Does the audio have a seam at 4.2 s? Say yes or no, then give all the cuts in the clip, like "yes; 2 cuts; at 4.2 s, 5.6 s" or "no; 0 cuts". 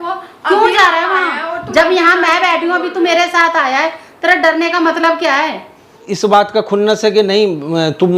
no; 1 cut; at 6.0 s